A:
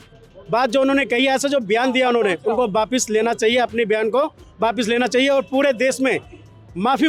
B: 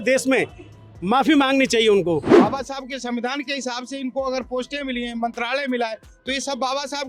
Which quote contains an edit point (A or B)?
B